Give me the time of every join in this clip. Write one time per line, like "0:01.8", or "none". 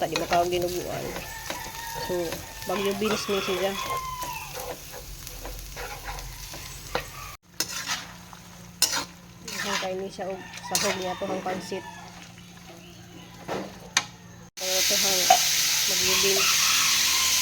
0:07.4
0:14.4

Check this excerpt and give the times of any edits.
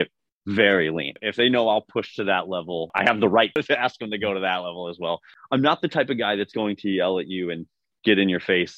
0:01.1
0:02.9
0:03.6
0:05.3

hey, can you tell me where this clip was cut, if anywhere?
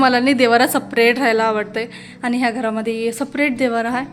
none

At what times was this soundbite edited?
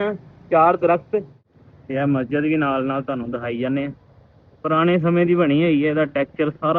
0:01.4

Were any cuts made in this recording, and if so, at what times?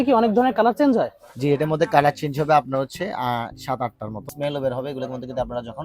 0:04.2

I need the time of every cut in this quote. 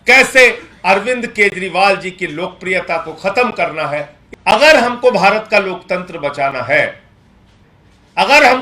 0:04.2

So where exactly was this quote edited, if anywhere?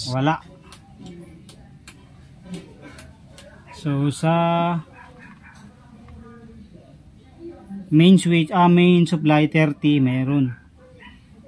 none

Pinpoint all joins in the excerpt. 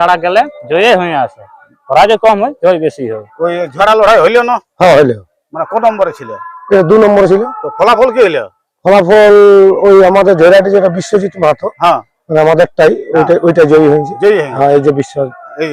0:03.6

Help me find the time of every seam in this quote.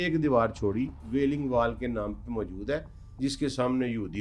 0:01.0

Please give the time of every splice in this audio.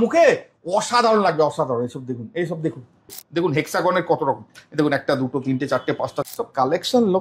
0:03.1
0:06.2

